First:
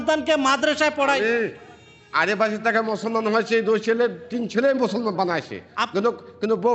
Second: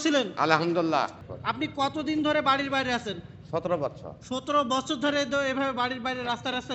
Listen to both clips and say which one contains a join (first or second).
second